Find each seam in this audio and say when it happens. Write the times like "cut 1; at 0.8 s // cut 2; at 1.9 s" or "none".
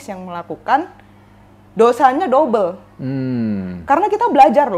none